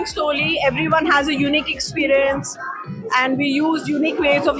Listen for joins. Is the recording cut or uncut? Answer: uncut